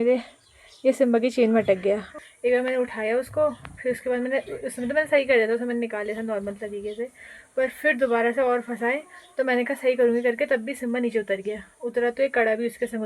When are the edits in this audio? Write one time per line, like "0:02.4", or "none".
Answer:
0:02.1